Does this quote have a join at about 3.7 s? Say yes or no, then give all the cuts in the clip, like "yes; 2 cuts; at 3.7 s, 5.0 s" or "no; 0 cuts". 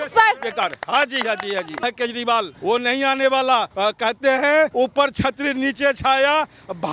yes; 4 cuts; at 1.7 s, 2.5 s, 3.7 s, 4.7 s